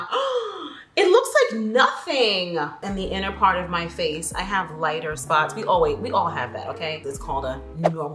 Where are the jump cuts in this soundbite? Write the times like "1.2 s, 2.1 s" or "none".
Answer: 2.8 s, 7.0 s